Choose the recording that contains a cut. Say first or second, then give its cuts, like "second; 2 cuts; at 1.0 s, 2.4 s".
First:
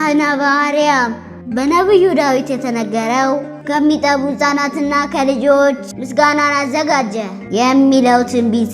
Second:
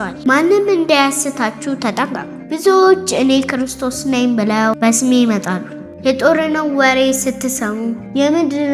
first; 1 cut; at 1.3 s